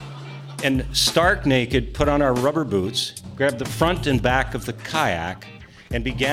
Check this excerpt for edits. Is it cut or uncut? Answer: uncut